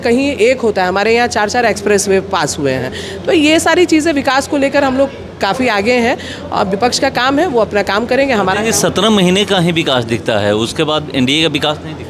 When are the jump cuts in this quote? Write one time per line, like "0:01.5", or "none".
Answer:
none